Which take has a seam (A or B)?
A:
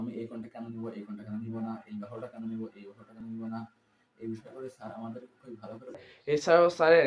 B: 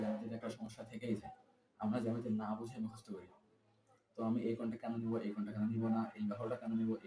A